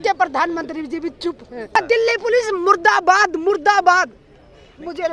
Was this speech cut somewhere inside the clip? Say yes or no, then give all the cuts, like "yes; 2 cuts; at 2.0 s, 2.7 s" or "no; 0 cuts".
yes; 1 cut; at 1.8 s